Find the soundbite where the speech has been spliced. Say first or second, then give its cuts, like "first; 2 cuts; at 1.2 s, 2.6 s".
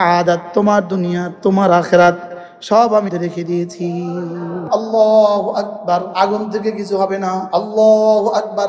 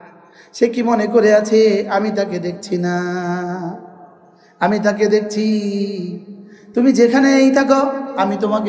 first; 4 cuts; at 3.1 s, 4.6 s, 6.1 s, 7.4 s